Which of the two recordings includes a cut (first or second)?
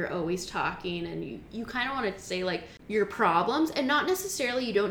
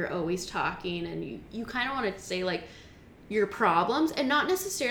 first